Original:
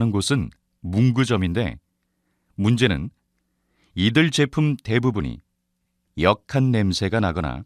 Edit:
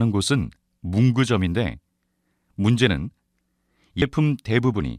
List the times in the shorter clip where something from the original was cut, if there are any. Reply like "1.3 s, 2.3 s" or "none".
4.0 s